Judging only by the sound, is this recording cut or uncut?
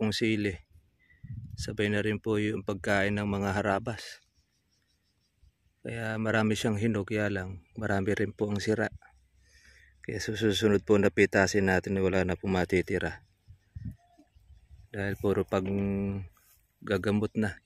uncut